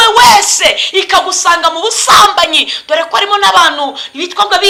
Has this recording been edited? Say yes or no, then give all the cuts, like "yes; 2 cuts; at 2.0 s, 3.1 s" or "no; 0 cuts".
no; 0 cuts